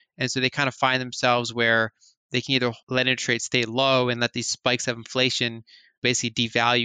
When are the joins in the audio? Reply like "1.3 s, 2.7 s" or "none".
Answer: 2.8 s, 6.0 s